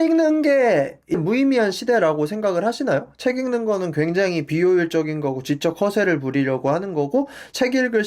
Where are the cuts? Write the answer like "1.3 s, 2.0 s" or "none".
1.2 s